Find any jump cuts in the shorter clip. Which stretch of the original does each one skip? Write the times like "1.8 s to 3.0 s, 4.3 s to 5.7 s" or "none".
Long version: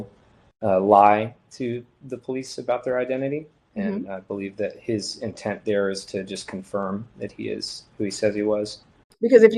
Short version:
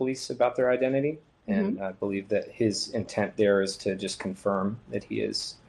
none